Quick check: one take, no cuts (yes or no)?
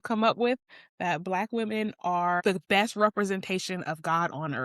no